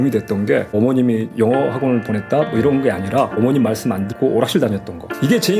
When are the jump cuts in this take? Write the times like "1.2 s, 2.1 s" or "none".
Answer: none